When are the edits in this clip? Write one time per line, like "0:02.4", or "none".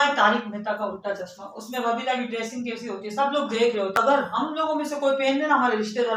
0:04.0